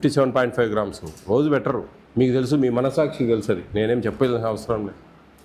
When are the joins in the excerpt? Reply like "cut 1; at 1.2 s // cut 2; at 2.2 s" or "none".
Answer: cut 1; at 2.0 s